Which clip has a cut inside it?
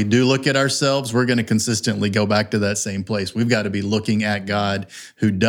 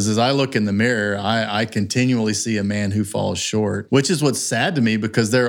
second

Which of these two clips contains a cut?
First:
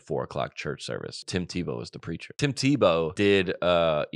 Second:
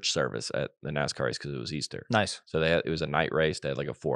first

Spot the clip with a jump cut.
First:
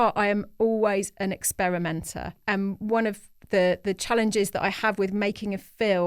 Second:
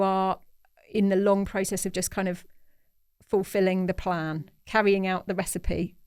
first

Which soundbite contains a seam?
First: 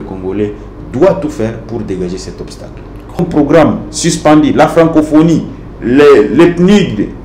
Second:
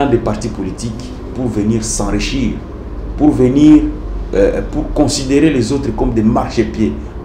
first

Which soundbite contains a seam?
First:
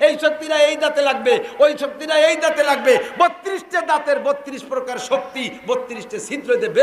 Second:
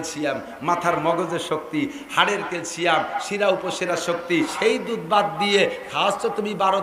second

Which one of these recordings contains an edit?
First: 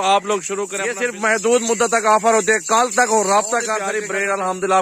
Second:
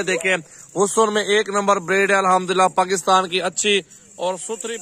first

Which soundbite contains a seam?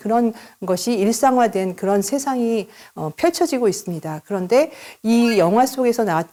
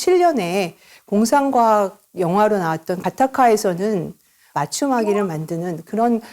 second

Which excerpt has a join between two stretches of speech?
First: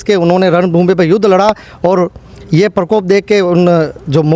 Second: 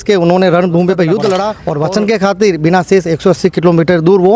second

